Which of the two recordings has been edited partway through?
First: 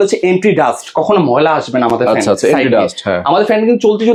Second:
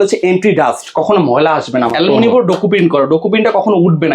second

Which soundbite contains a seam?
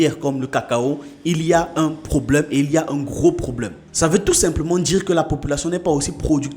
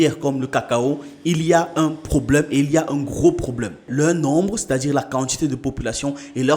second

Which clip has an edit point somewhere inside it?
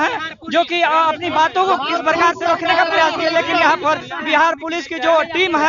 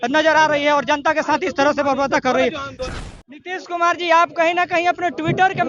second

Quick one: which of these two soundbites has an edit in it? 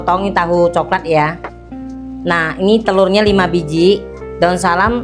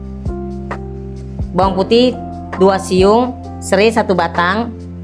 second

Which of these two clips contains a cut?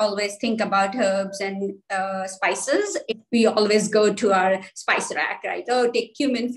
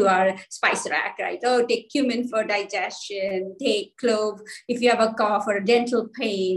first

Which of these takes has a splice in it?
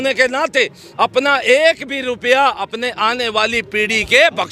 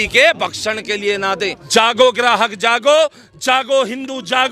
second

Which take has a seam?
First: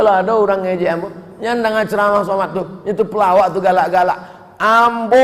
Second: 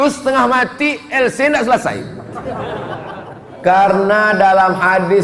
second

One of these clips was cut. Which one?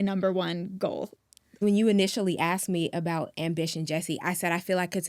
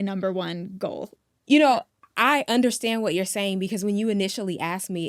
first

